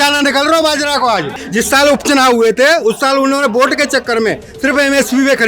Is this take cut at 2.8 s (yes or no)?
no